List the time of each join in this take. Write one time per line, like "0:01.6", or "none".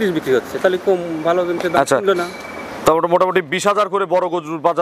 none